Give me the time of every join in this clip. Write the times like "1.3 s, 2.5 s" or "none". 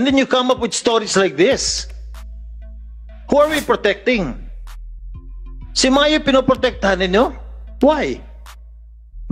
none